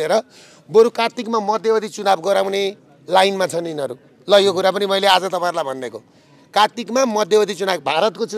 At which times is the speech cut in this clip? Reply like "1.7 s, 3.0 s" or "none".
none